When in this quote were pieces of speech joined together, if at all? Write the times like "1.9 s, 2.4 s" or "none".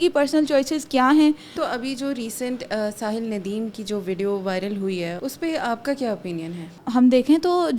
1.6 s, 5.2 s, 6.8 s